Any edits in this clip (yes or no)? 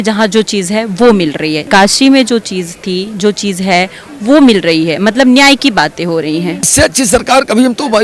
yes